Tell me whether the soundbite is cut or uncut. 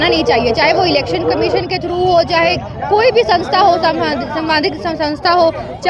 uncut